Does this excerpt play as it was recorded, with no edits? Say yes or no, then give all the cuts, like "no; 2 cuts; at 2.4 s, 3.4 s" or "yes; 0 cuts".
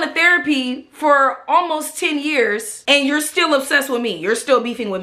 yes; 0 cuts